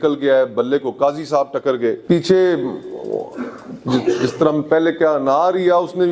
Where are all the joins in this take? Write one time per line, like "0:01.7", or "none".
0:02.0